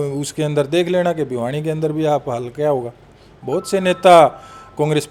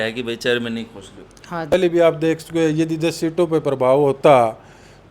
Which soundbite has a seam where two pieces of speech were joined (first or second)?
second